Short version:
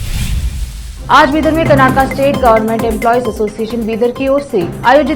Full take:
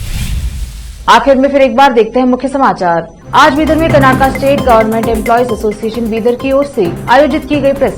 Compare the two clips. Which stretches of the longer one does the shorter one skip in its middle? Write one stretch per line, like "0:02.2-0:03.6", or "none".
0:00.9-0:03.2